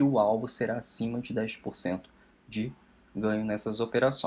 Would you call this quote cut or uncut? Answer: uncut